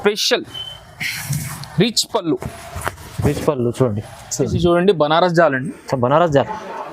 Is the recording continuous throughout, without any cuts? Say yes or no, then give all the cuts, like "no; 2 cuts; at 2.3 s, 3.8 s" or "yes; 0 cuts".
no; 1 cut; at 4.4 s